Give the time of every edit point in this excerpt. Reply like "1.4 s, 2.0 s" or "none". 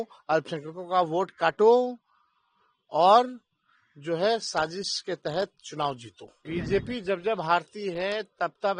6.6 s